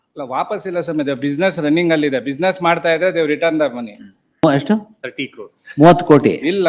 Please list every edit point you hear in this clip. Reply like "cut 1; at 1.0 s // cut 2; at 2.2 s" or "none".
cut 1; at 4.4 s